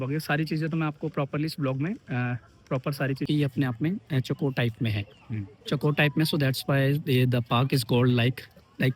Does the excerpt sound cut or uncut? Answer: cut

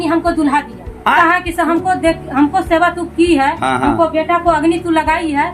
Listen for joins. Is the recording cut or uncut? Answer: cut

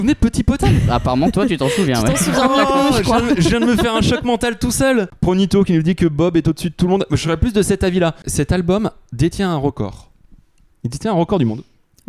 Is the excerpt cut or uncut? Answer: cut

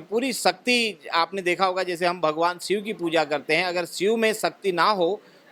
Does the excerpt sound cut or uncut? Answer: uncut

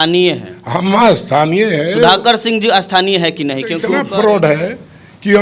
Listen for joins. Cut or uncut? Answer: cut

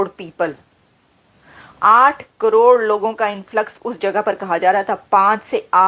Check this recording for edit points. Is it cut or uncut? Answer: uncut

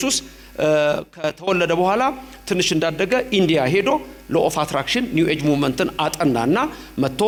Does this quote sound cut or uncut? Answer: uncut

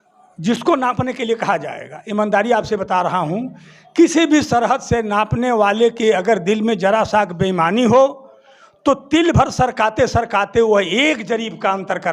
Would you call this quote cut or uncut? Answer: uncut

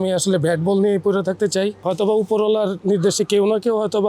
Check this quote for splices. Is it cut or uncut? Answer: cut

